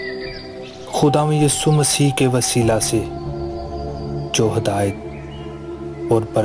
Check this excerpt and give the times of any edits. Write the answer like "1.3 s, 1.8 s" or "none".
0.9 s